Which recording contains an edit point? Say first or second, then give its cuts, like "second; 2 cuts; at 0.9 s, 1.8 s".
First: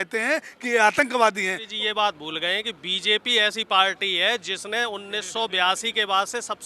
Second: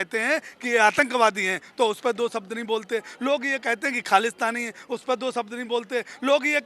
first; 1 cut; at 1.6 s